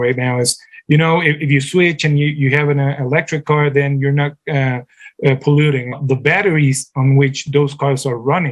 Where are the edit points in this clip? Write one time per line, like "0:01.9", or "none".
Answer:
0:06.0